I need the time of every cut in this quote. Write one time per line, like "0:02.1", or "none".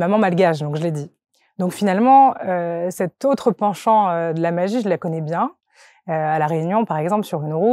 none